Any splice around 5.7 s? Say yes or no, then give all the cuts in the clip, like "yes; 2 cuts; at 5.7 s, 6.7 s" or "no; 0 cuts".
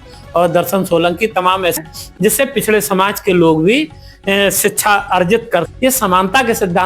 yes; 2 cuts; at 1.8 s, 5.7 s